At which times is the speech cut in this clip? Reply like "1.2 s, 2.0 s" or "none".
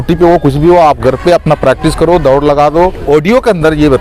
3.0 s